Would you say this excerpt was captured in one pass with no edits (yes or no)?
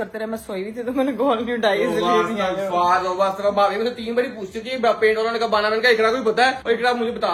yes